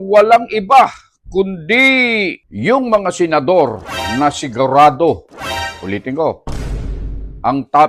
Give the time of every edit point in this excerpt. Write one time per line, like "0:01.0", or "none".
0:02.4